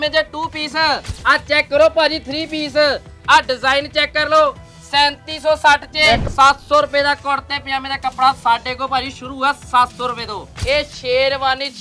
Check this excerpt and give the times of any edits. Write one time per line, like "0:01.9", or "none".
0:01.2
0:06.3
0:10.4